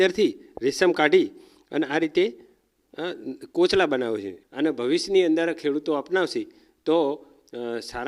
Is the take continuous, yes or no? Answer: no